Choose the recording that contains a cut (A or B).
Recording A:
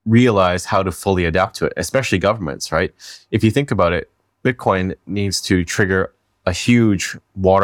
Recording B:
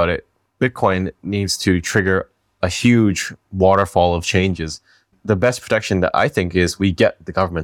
B